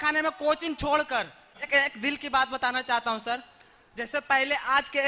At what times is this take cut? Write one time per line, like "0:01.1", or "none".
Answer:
0:01.6